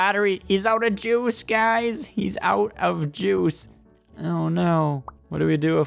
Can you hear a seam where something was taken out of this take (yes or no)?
no